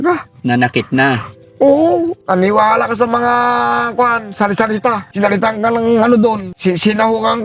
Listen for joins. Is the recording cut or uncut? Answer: cut